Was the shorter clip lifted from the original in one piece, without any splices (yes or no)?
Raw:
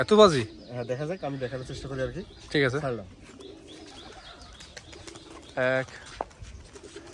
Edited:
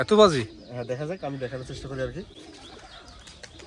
no